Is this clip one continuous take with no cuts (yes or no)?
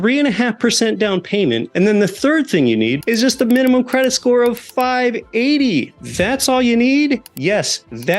no